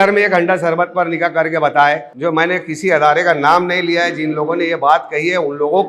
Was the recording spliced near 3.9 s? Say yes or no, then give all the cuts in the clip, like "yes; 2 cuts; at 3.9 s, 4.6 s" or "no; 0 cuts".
no; 1 cut; at 2.1 s